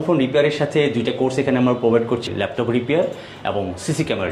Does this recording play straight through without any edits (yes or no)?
no